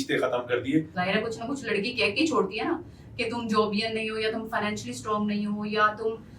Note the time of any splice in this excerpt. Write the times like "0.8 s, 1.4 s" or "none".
0.9 s

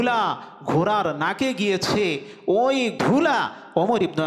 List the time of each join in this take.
2.9 s

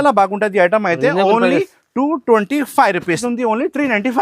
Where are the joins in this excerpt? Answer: 3.2 s

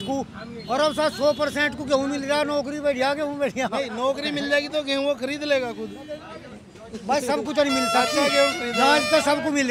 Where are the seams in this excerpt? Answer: none

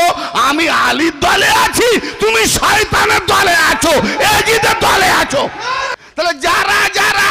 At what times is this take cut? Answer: 5.9 s

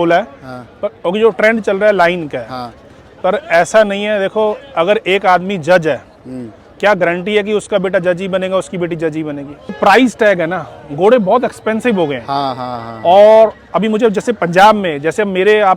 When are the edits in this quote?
9.8 s

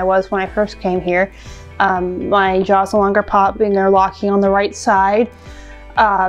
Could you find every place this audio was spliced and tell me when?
none

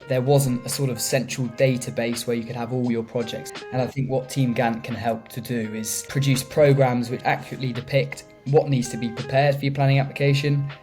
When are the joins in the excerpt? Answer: 3.4 s, 6.0 s, 7.2 s

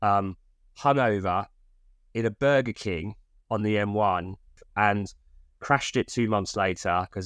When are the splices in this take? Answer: 4.6 s

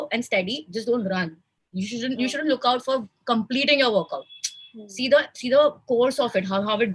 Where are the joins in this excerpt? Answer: none

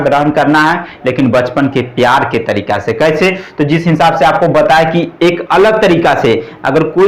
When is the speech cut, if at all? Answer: none

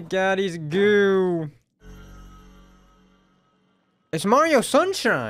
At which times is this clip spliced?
none

